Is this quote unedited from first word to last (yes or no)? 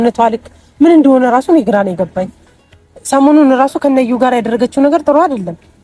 yes